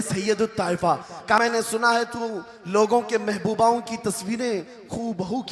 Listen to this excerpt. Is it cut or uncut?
cut